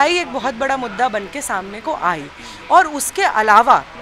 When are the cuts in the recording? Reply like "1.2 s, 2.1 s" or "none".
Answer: none

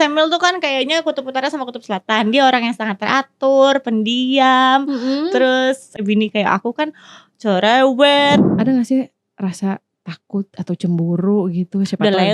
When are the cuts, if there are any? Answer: 6.0 s, 8.5 s

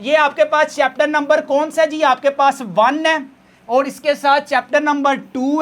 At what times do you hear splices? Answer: none

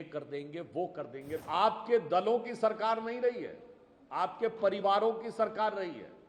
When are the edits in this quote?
1.4 s

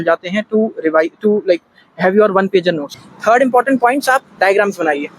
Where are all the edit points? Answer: 2.9 s

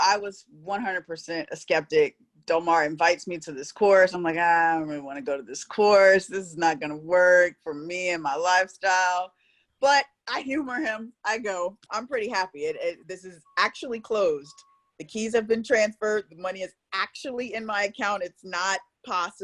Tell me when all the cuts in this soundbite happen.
11.8 s

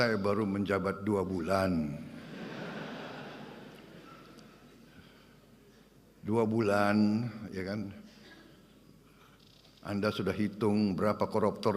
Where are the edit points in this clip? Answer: none

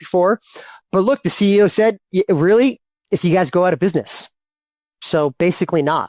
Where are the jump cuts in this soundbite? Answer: none

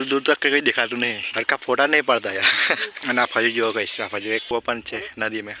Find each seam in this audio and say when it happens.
1.3 s, 2.9 s, 4.5 s

